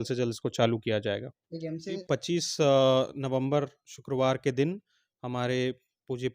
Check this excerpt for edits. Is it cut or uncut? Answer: cut